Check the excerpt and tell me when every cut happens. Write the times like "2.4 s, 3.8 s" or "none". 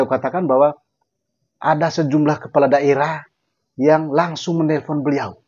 none